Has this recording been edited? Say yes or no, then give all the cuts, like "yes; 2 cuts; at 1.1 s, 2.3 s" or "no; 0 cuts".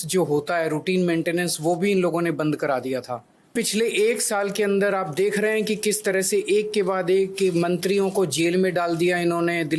yes; 1 cut; at 3.5 s